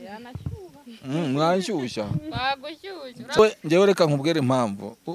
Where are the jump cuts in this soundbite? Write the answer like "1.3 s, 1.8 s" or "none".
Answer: 3.4 s